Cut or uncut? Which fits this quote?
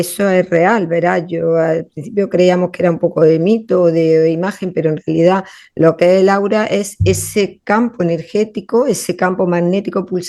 uncut